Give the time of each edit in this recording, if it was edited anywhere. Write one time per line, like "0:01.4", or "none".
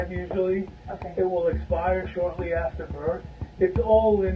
0:03.3